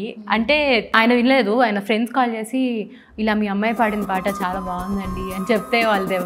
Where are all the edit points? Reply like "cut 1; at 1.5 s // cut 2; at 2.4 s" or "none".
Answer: cut 1; at 0.9 s